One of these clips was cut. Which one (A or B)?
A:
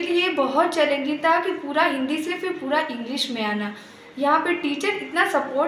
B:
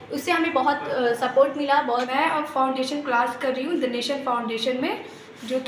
B